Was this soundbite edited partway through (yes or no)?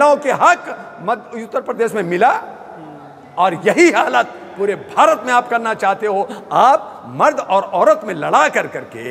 no